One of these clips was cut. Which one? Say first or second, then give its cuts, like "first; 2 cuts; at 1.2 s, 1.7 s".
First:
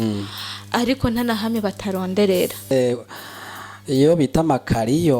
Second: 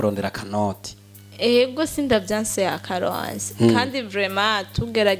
first; 1 cut; at 2.7 s